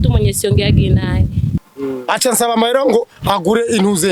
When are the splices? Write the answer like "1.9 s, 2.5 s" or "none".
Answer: 1.6 s